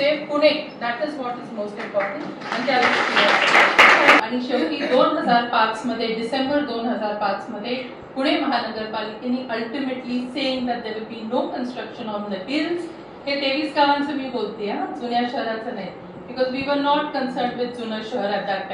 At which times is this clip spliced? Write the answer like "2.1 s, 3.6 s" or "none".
4.3 s